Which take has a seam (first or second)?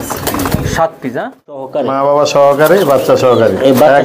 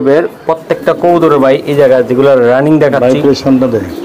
first